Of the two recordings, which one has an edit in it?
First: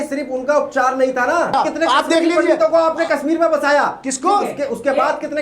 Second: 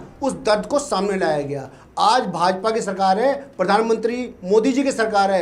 first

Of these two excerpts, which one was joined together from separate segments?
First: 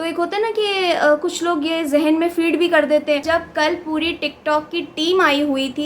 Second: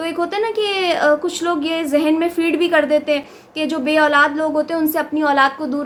first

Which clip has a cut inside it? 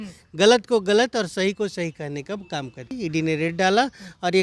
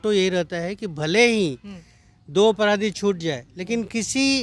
first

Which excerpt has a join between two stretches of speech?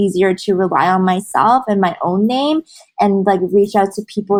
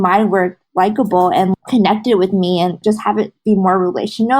second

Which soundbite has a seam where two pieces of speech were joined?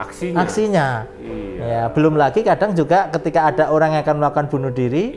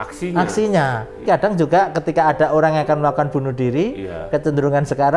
second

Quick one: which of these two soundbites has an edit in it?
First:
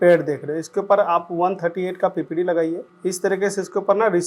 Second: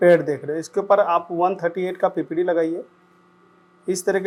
first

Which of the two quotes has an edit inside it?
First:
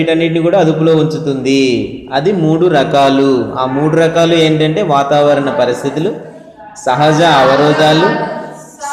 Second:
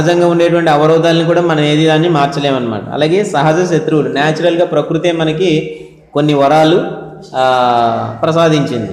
first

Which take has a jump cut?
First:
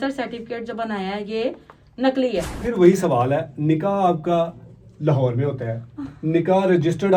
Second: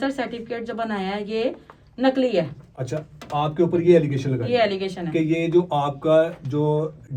first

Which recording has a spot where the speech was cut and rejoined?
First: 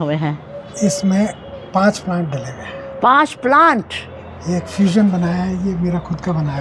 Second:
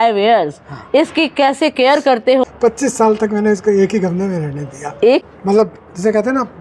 second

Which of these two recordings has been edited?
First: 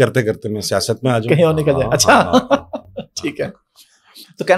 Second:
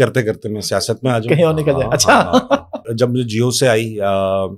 second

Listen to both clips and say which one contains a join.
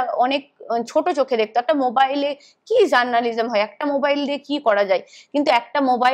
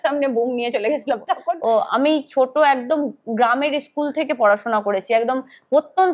second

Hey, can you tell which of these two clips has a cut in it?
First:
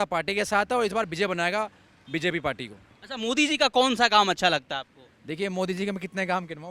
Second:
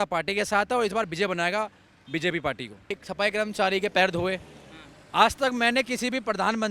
second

